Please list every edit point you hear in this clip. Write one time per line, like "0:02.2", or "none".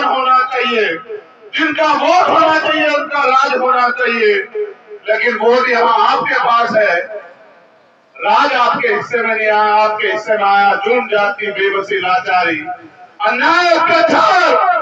none

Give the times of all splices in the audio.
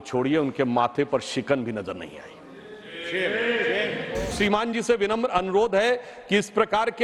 0:04.3

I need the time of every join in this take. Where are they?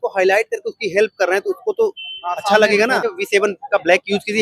0:03.0

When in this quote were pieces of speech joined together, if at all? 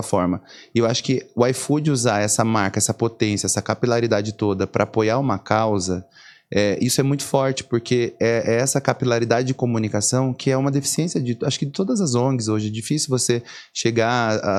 none

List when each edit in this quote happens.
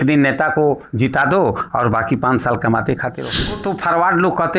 0:03.6

